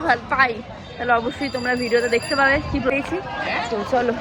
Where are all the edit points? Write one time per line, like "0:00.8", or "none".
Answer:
0:02.9